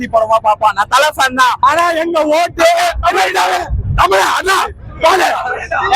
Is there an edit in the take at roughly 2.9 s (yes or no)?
no